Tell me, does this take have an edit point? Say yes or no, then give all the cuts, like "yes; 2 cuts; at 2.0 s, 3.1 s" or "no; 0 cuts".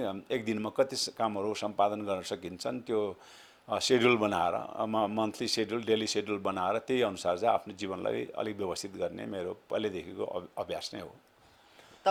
no; 0 cuts